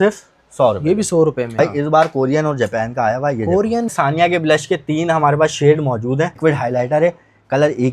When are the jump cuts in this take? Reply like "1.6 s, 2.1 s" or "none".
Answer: 1.6 s, 3.9 s, 6.3 s